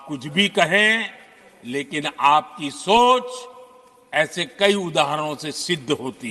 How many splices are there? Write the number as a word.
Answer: zero